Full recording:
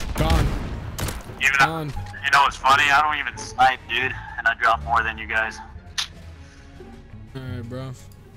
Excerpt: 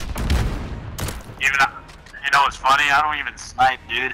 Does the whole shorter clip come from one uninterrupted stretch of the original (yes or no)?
yes